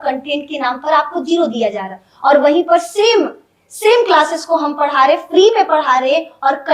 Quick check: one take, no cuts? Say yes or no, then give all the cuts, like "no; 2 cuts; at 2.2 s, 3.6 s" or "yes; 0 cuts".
yes; 0 cuts